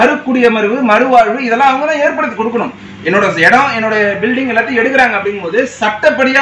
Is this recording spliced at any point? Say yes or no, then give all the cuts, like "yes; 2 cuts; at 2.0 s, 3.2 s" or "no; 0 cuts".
no; 0 cuts